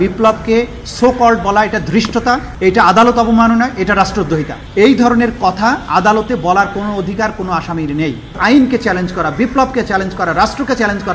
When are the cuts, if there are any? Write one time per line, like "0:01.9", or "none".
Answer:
0:08.4